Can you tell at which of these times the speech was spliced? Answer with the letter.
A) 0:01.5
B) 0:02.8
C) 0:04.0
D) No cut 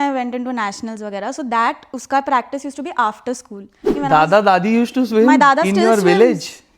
C